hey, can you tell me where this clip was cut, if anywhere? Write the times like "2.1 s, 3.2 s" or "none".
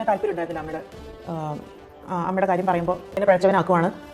3.1 s

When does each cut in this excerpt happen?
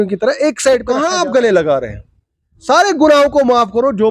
1.1 s

